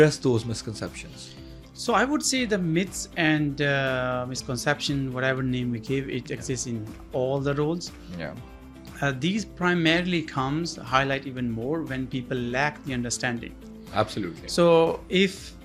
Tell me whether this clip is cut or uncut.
uncut